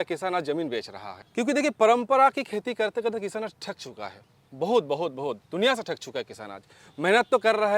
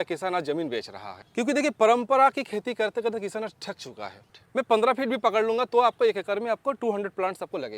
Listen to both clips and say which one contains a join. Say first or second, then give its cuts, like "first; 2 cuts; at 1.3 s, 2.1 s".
second; 1 cut; at 4.3 s